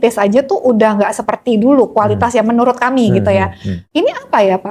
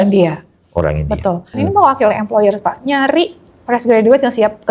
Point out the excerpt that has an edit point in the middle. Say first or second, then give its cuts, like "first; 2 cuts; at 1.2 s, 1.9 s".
second; 1 cut; at 1.6 s